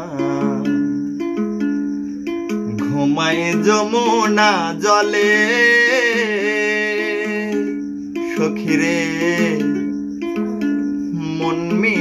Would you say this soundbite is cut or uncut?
uncut